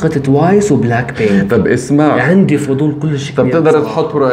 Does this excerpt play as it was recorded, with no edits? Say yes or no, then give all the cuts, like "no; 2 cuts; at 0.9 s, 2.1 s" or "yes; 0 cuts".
yes; 0 cuts